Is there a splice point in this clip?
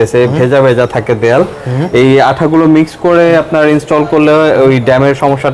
no; 0 cuts

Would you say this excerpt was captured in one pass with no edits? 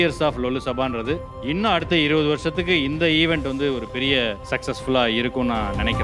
no; 2 cuts; at 1.3 s, 4.5 s

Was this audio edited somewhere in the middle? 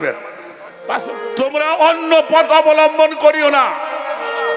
yes; 1 cut; at 1.2 s

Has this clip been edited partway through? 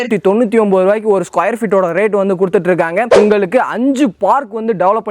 yes; 1 cut; at 3.1 s

